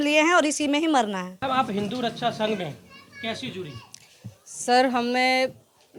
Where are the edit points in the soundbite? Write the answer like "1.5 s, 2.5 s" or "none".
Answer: none